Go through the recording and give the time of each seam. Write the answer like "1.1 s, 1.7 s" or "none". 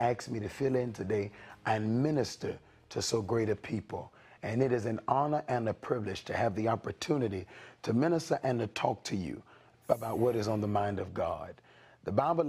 6.8 s